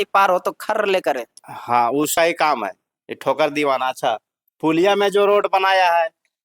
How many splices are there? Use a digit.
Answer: 1